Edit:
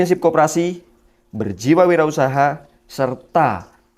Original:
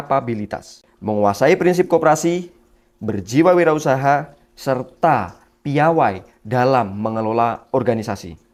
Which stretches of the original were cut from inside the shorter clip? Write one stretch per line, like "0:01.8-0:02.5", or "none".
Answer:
none